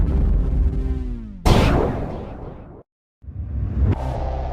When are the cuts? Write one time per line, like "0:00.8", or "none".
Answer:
0:02.2